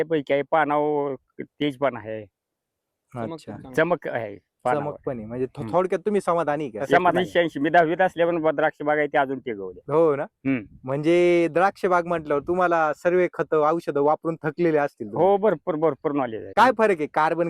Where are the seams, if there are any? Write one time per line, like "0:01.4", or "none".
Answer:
0:07.2
0:16.4